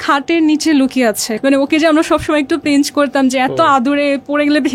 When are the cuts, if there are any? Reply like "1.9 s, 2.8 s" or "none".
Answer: 1.3 s

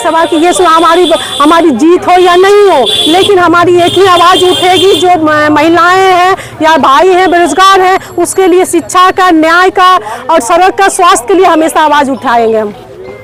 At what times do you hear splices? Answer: none

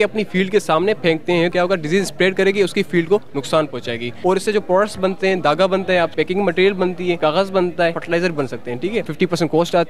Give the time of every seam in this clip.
1.5 s, 4.1 s, 6.1 s, 7.2 s, 8.0 s, 9.1 s

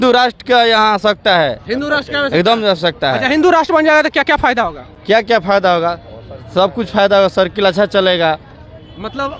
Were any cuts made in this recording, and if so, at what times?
none

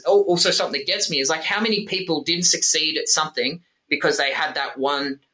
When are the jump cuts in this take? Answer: none

